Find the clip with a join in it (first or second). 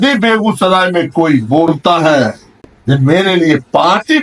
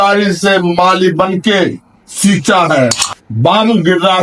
second